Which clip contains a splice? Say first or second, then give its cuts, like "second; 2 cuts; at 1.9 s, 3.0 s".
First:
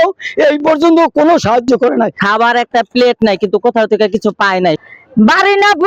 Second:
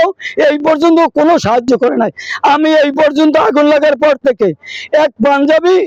first; 2 cuts; at 2.2 s, 4.8 s